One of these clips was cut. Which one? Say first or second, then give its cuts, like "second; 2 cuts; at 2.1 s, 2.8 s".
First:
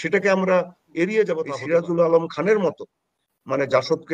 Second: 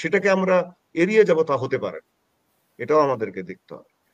first; 1 cut; at 1.5 s